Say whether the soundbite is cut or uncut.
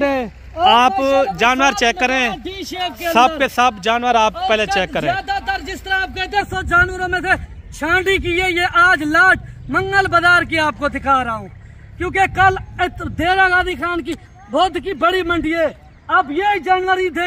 cut